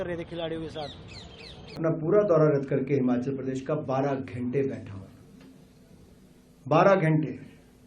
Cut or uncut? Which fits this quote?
cut